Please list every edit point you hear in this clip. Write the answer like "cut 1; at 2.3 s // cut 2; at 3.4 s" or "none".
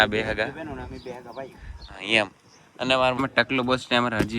cut 1; at 3.2 s

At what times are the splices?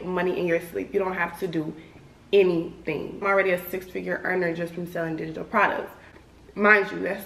cut 1; at 3.2 s

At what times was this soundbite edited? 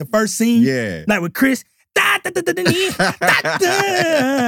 none

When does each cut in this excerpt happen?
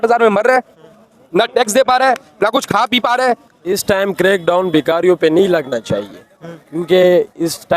cut 1; at 3.7 s

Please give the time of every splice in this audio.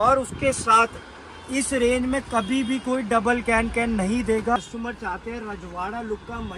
cut 1; at 4.6 s

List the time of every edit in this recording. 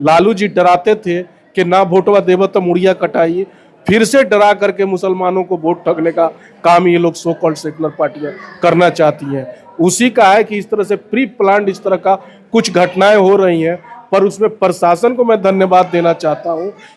none

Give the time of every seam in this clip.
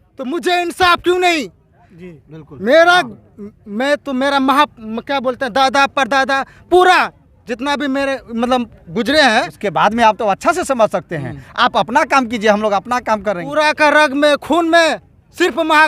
cut 1; at 9.6 s // cut 2; at 13.5 s

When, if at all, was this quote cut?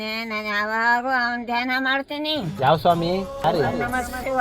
cut 1; at 3.4 s

